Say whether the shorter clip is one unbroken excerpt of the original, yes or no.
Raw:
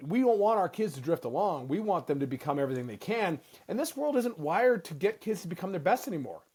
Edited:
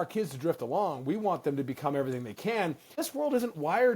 no